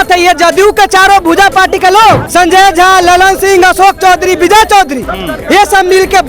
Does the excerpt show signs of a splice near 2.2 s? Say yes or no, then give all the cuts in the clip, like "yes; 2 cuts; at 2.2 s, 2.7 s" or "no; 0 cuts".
yes; 1 cut; at 2.2 s